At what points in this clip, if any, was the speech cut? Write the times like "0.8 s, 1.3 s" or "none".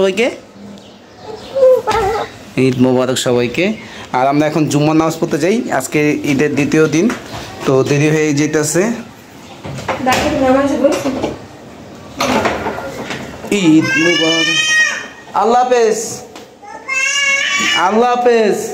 none